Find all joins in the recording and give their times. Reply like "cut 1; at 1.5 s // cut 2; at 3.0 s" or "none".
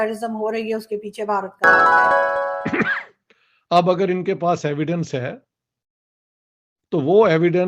cut 1; at 1.6 s // cut 2; at 2.5 s